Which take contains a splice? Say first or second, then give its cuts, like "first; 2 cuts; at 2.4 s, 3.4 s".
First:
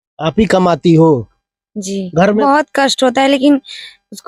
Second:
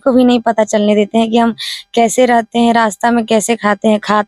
first; 1 cut; at 2.4 s